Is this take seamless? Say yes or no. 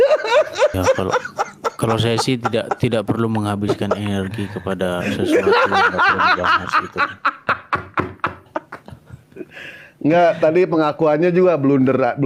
yes